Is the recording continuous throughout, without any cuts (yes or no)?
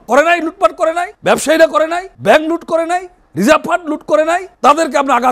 no